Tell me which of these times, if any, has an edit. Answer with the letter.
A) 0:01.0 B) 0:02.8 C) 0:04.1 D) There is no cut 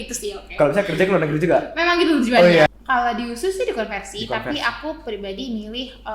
B